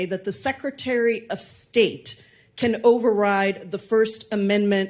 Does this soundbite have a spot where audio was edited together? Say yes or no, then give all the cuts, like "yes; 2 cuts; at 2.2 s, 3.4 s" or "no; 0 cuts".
no; 0 cuts